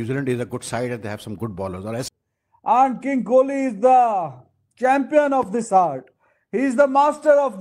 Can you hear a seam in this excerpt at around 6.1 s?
no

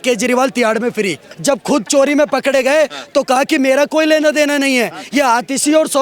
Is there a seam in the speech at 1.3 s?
yes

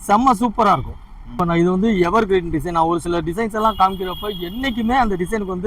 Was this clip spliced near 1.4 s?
yes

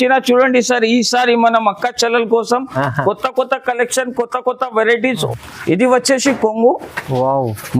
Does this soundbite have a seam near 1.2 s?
no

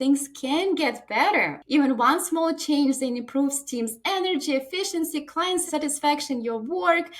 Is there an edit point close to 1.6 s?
yes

